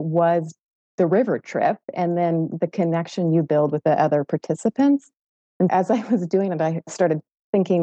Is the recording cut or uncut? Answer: cut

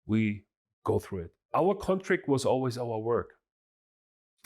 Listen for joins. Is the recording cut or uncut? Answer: cut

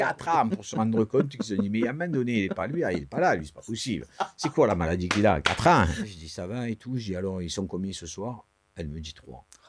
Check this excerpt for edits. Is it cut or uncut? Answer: cut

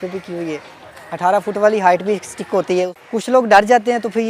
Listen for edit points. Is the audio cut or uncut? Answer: cut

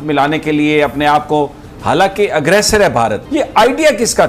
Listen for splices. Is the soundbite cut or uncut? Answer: cut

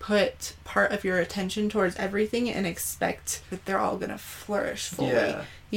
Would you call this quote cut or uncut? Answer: cut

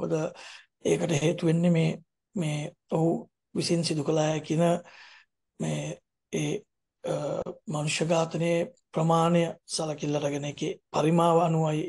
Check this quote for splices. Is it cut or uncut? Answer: uncut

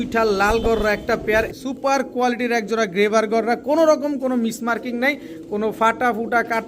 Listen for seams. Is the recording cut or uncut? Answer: cut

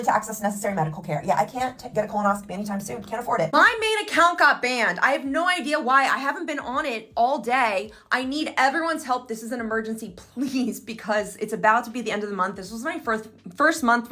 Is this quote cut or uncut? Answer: cut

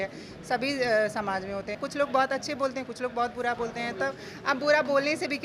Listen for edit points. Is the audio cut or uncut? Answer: cut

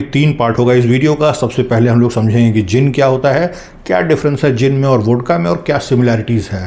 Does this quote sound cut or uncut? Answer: uncut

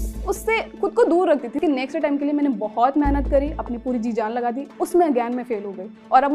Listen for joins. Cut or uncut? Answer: cut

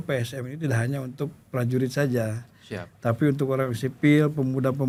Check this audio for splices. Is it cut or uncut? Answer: uncut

